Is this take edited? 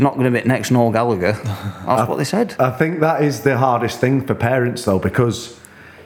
no; 0 cuts

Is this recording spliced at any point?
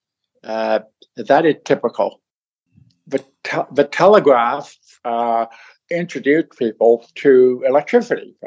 yes; 1 cut; at 2.6 s

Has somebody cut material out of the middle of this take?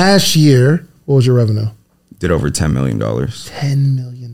yes; 1 cut; at 0.9 s

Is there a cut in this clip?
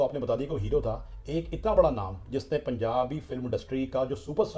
no; 0 cuts

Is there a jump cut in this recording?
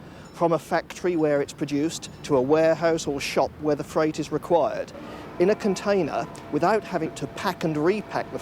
yes; 1 cut; at 7.1 s

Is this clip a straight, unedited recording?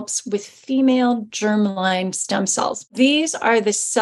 no; 1 cut; at 2.9 s

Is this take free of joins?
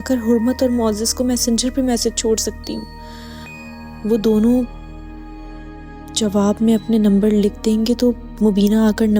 yes; 0 cuts

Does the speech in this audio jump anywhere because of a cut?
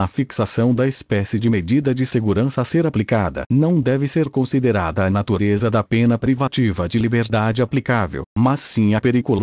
no; 0 cuts

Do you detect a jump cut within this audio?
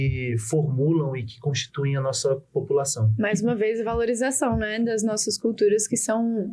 no; 0 cuts

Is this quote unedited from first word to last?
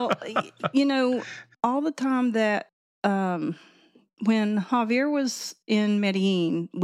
yes; 0 cuts

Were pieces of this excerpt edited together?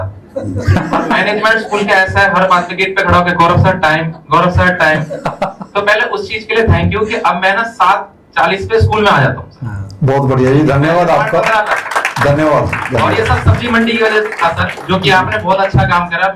no; 0 cuts

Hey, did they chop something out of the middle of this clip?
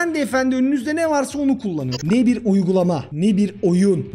yes; 1 cut; at 1.9 s

